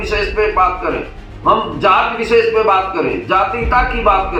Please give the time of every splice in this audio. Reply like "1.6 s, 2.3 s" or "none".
none